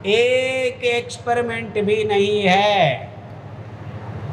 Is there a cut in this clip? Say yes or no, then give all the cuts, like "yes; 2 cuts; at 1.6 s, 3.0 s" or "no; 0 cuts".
no; 0 cuts